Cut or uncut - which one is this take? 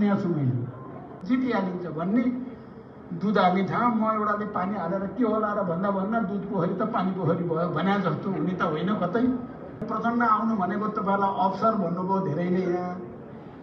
cut